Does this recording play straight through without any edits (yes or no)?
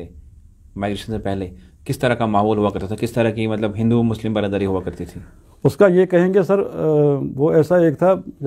yes